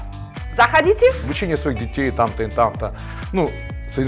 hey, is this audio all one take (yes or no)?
no